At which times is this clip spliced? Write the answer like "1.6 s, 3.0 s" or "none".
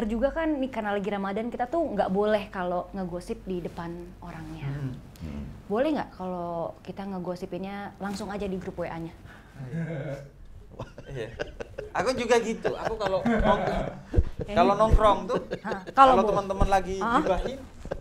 none